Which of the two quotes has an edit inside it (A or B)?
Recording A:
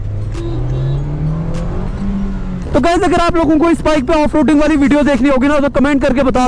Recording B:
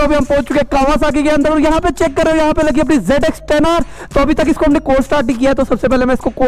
A